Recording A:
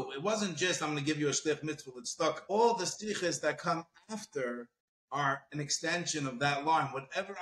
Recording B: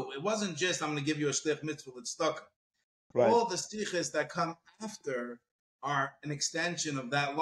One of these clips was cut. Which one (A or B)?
A